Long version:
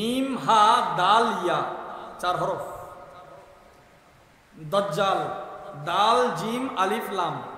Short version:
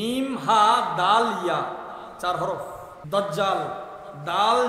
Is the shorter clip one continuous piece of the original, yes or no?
no